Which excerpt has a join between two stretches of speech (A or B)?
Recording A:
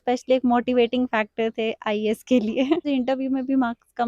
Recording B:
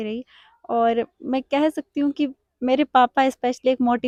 A